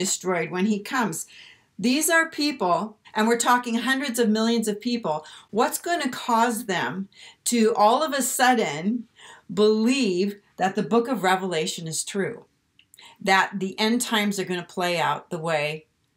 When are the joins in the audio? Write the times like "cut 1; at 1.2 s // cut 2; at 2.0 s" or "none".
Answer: cut 1; at 3.1 s